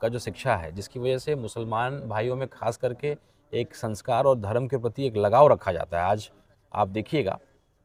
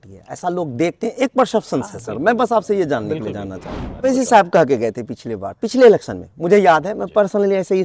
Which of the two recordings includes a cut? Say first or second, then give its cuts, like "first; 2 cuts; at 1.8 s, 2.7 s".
second; 1 cut; at 4.0 s